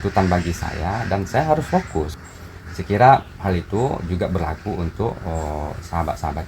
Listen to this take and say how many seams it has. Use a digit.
1